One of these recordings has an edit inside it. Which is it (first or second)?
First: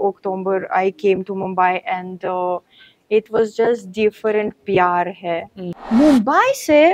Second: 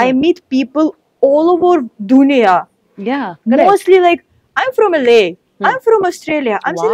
first